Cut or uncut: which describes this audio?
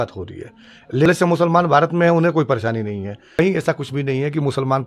cut